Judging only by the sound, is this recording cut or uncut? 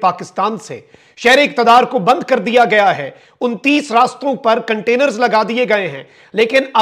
uncut